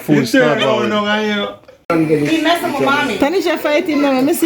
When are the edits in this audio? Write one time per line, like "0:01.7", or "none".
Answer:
0:01.8